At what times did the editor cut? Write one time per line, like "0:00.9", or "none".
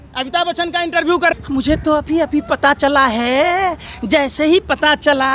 0:01.3